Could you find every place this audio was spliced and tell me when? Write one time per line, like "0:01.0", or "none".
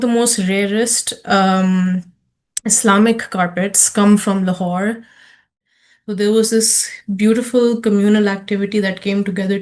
0:05.6

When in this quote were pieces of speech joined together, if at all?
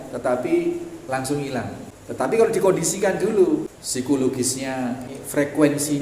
0:01.9
0:03.8
0:05.1

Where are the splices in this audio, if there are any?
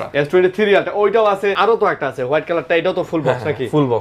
0:01.6

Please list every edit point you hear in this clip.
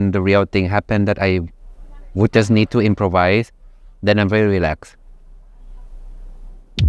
none

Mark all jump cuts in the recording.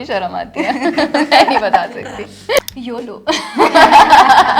0:02.6

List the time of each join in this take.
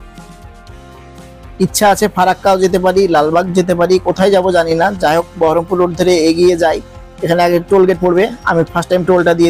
none

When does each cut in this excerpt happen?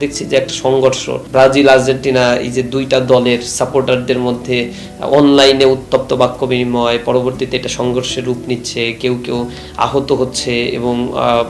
0:01.2

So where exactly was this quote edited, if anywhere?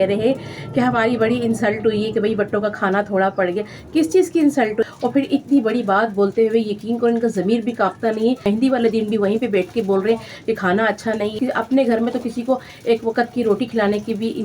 0:04.9
0:08.5
0:11.4

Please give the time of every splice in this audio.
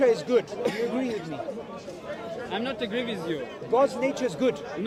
none

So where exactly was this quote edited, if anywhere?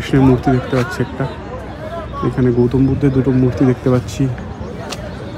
none

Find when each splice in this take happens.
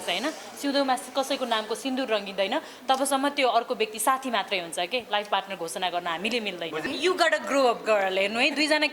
0:06.8

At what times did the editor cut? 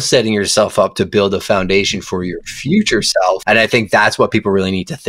0:03.4

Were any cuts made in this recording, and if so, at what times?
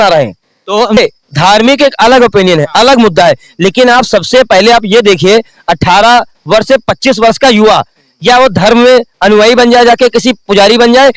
0:01.0

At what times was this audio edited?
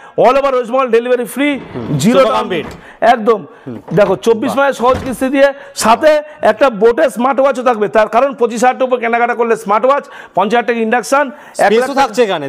none

